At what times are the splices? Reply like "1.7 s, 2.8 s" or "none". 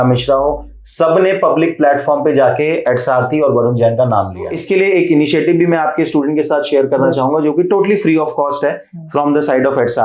4.6 s

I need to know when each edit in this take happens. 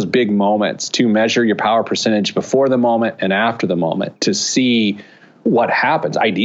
4.1 s, 5.4 s

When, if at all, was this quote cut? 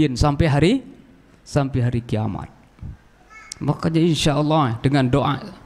none

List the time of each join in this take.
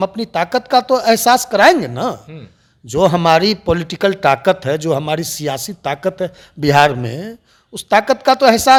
none

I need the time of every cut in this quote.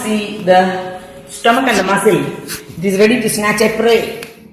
none

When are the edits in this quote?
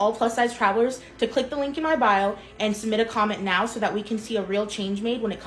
none

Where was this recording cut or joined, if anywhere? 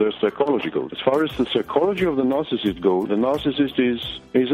none

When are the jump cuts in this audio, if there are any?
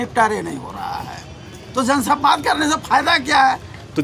none

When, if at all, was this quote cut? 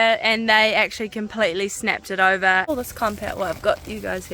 2.7 s

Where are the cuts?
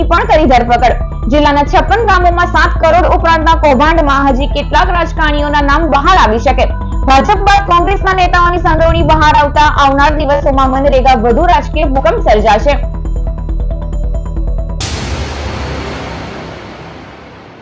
14.8 s

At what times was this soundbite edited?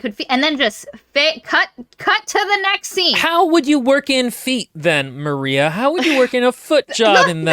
3.2 s

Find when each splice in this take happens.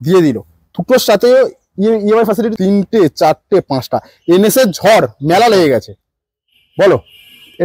2.5 s

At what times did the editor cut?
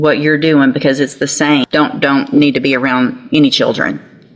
1.7 s

